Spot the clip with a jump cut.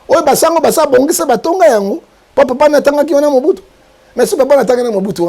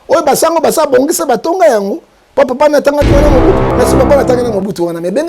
second; 1 cut; at 3.7 s

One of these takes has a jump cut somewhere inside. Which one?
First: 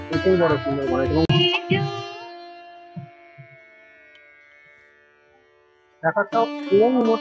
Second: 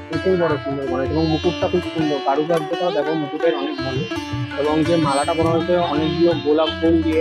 first; 1 cut; at 1.3 s

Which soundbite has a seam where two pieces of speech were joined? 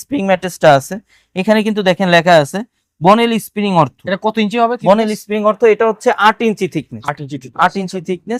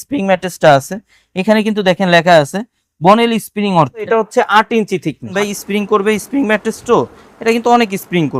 second; 2 cuts; at 4.1 s, 5.3 s

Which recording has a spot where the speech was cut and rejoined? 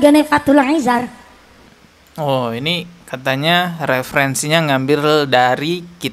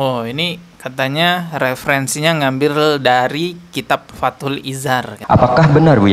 second; 1 cut; at 5.1 s

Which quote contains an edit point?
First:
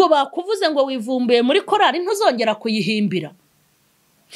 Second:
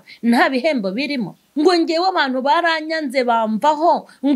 second; 1 cut; at 1.4 s

